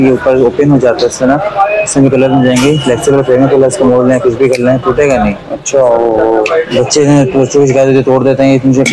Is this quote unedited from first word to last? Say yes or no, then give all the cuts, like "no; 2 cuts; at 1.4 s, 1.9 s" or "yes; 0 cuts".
yes; 0 cuts